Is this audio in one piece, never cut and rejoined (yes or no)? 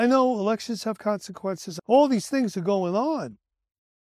no